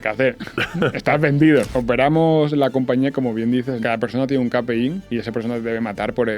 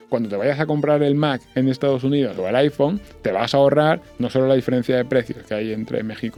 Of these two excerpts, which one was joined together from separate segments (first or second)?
first